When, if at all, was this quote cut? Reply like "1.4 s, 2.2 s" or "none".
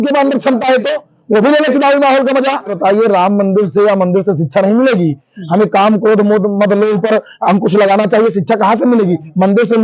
2.8 s